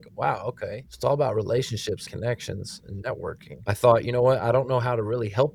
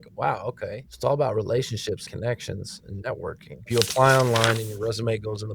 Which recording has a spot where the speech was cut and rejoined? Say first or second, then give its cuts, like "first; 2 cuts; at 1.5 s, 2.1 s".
second; 1 cut; at 3.7 s